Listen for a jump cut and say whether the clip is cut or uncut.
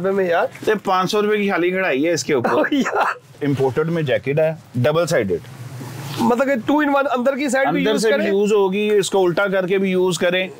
cut